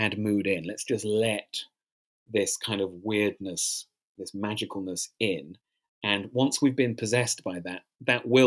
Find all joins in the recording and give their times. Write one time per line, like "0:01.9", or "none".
none